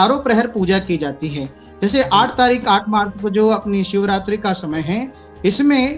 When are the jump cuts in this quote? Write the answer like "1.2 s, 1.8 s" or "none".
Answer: none